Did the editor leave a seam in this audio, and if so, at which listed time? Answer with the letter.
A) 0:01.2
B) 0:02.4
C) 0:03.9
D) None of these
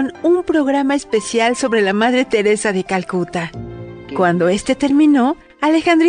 C